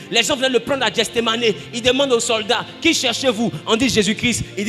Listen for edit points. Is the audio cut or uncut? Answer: uncut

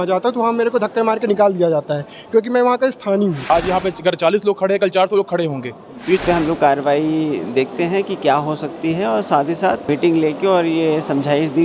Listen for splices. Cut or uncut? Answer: cut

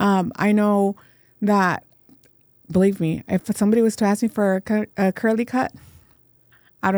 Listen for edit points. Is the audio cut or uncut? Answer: uncut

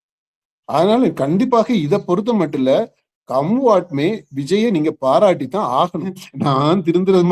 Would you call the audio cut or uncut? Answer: cut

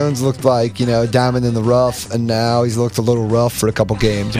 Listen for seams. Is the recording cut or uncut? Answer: uncut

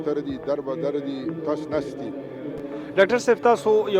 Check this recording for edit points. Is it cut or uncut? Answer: cut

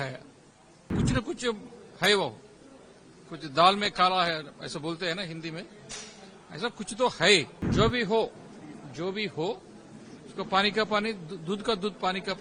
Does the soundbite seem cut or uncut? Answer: cut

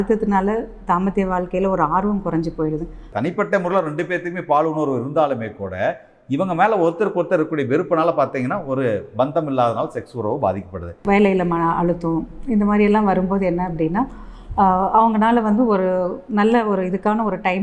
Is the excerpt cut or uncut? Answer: cut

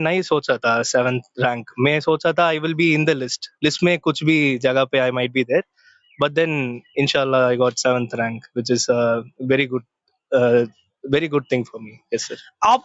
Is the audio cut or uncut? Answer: uncut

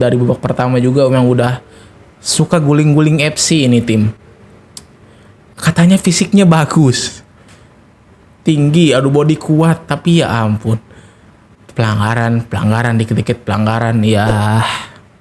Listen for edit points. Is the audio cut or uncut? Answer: uncut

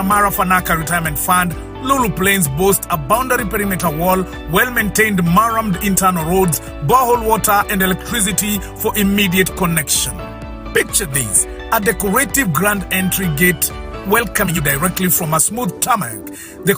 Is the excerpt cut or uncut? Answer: cut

